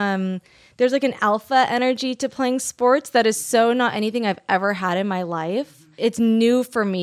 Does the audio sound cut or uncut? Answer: cut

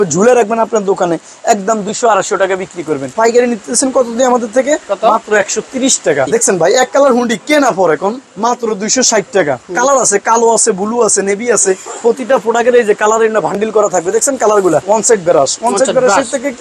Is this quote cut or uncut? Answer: cut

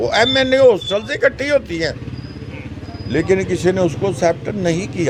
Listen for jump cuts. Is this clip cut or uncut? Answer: uncut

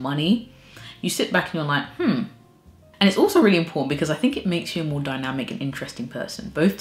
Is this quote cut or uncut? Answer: uncut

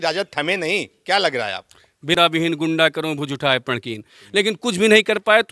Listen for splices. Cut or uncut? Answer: cut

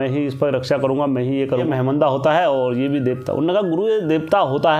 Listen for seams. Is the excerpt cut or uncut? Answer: cut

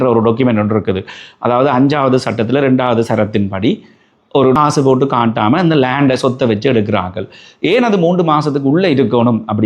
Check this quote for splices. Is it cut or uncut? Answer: cut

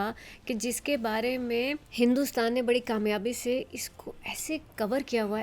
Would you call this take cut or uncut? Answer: cut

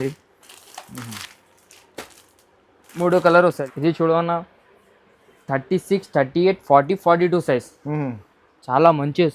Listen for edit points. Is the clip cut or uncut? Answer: cut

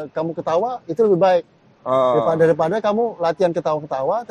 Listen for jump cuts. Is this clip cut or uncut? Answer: uncut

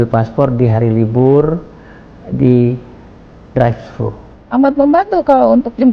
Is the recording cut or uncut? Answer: cut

